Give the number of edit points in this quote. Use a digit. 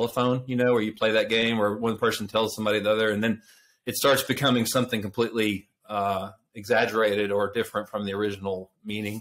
0